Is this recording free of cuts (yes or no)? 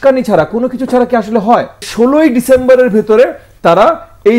no